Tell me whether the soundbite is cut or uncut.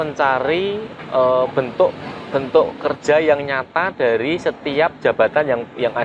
uncut